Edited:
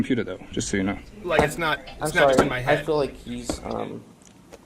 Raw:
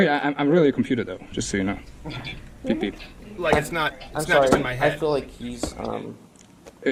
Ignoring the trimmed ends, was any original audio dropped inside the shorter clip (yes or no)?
yes